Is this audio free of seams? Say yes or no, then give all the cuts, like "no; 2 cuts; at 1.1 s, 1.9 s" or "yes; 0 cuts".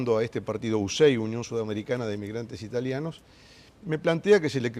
no; 1 cut; at 3.2 s